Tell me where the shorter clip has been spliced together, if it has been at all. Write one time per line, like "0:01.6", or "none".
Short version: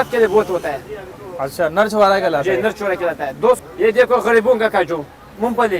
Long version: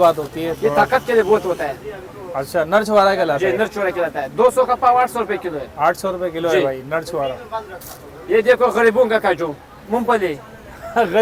0:03.6